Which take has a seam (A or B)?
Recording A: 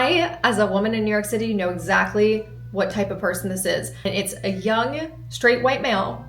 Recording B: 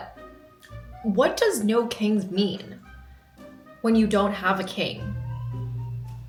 A